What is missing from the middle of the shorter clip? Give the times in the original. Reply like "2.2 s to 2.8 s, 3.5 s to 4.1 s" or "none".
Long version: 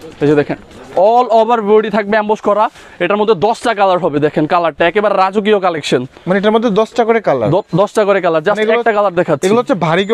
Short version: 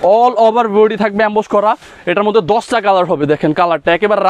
none